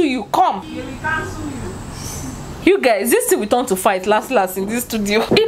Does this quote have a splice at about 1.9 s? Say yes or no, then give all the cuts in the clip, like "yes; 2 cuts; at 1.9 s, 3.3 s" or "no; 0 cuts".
no; 0 cuts